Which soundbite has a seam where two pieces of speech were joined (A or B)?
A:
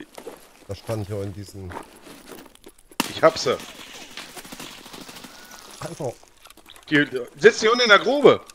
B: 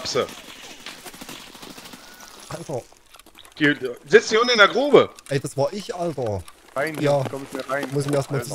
B